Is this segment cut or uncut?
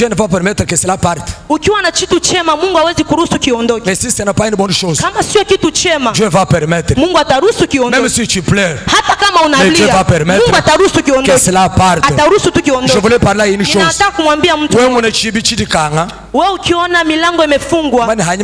uncut